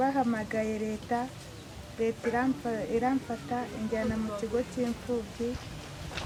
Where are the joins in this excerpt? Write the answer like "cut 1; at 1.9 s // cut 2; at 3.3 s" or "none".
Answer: none